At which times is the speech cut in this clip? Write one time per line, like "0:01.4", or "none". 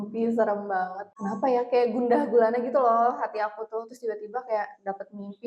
0:01.1

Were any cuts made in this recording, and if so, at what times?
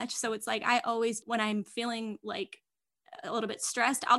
0:01.2

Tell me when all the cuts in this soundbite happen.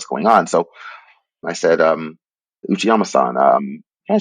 0:01.5
0:02.6

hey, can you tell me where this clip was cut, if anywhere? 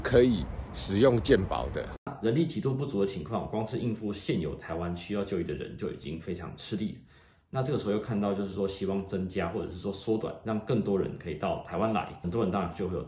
0:02.1
0:12.2

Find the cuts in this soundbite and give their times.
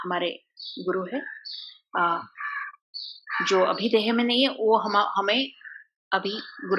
none

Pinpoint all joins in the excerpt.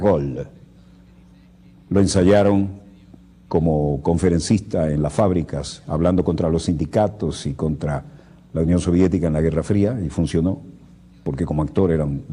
none

